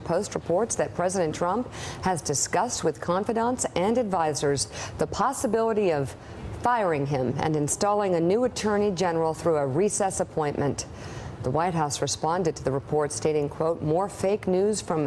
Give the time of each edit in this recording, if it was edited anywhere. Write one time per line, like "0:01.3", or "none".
0:09.3